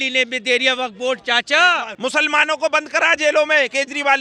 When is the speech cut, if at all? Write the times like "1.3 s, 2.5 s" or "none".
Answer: 1.9 s